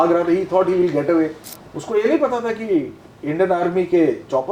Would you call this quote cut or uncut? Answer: uncut